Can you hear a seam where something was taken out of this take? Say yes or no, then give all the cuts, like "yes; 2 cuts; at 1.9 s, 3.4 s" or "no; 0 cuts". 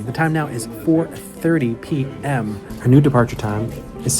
yes; 1 cut; at 2.7 s